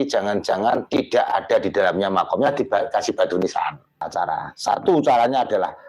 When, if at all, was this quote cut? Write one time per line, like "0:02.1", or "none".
0:04.1